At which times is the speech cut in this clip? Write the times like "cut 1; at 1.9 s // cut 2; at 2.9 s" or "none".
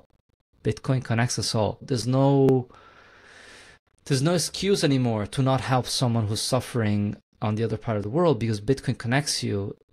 cut 1; at 1.8 s